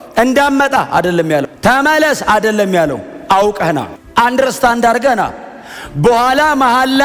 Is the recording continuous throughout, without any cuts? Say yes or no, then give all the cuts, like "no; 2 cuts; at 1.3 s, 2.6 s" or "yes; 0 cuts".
no; 1 cut; at 1.5 s